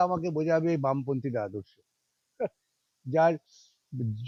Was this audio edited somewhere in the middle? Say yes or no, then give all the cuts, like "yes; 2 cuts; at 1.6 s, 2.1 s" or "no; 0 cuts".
no; 0 cuts